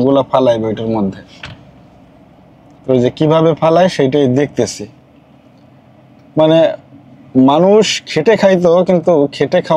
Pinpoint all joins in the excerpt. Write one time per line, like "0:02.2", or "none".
none